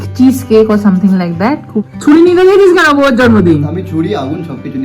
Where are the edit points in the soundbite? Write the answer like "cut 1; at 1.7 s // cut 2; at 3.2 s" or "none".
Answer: cut 1; at 1.7 s